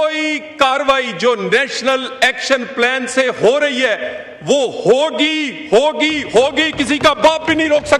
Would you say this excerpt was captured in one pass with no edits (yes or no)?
yes